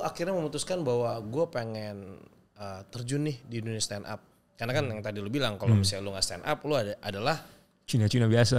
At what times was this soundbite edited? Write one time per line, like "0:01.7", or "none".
none